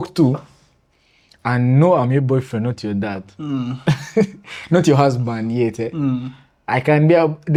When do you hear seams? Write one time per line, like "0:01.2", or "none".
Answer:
none

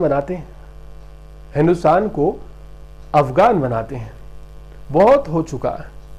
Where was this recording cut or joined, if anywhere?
none

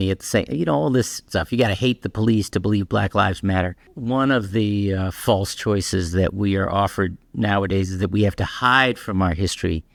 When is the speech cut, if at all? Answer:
none

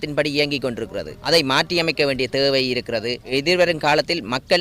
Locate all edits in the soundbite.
0:01.2
0:03.2

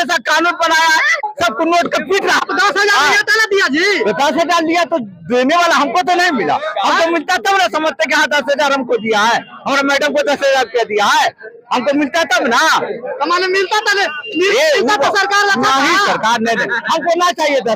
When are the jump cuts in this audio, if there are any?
0:01.2
0:02.4

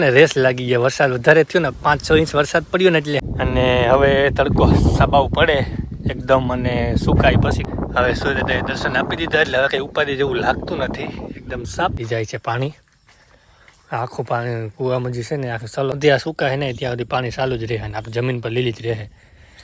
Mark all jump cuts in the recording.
0:03.2
0:07.7
0:12.0
0:16.0

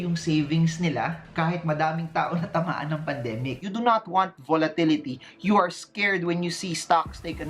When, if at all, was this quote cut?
0:03.6

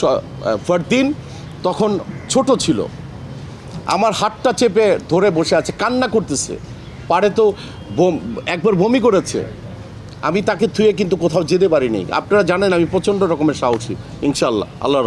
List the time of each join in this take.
none

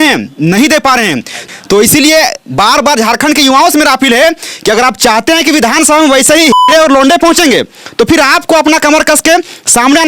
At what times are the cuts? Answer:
0:01.3

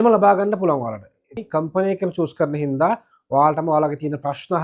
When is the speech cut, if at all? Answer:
0:01.4

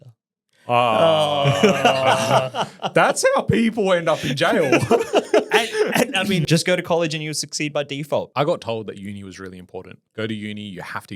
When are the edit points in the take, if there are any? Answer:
0:06.5
0:08.3
0:10.0

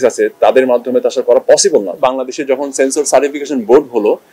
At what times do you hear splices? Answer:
0:02.0

